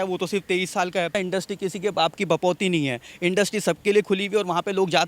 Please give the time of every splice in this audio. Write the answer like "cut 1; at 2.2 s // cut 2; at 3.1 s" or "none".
cut 1; at 1.1 s